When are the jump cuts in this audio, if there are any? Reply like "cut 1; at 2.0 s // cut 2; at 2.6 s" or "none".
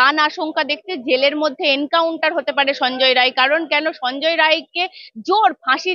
none